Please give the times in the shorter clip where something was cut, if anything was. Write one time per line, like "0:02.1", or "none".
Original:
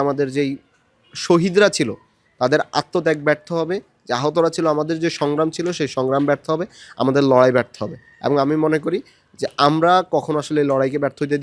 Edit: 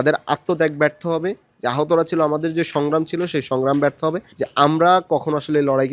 0:04.3